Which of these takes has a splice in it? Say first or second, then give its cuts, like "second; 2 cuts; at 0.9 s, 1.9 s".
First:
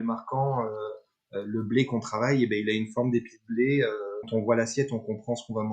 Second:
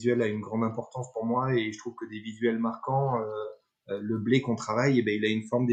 first; 1 cut; at 4.3 s